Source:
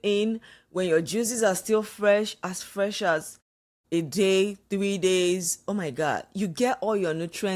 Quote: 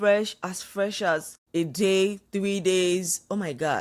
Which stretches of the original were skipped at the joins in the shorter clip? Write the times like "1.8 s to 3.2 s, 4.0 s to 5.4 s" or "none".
3.4 s to 3.7 s